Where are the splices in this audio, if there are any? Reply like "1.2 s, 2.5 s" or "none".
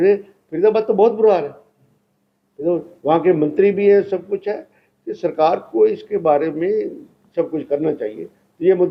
none